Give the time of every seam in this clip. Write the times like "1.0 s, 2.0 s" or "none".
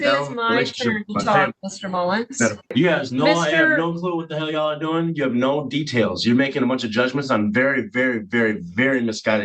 2.7 s

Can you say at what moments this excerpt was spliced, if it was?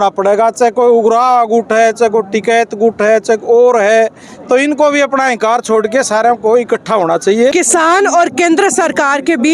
7.5 s

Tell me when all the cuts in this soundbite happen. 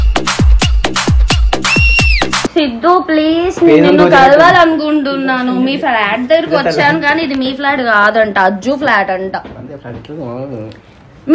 2.5 s

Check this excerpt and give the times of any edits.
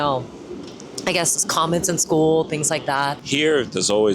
3.2 s

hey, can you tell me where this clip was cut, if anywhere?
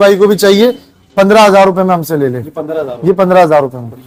none

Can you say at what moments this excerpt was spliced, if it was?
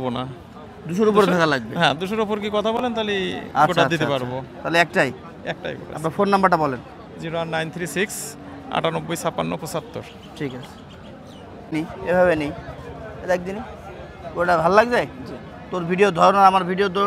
none

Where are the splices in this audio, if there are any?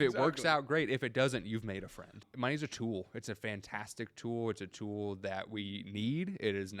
2.2 s

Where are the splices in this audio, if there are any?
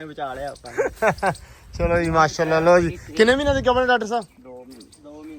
none

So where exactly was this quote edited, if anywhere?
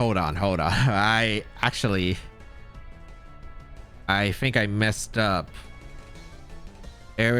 none

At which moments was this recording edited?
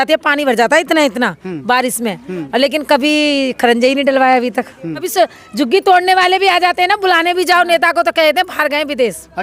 5.1 s

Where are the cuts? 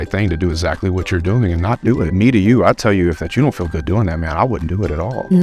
2.1 s

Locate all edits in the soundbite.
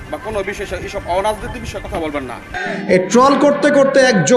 2.6 s

